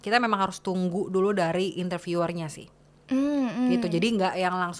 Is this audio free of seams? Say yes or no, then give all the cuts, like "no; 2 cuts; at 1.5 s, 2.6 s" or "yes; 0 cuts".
yes; 0 cuts